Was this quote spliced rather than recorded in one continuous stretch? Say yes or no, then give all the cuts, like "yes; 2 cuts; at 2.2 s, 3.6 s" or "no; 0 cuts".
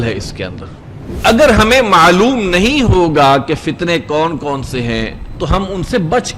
yes; 2 cuts; at 1.2 s, 5.2 s